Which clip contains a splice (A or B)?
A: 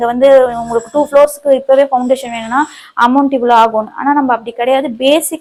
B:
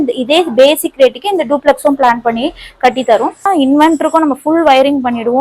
B